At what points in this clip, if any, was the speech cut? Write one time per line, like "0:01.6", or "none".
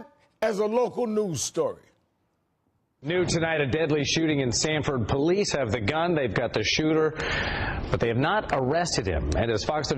0:02.4